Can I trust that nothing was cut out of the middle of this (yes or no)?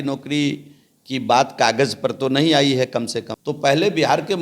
no